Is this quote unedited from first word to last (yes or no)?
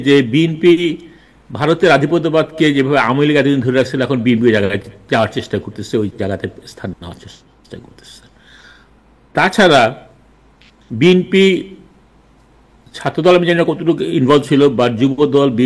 yes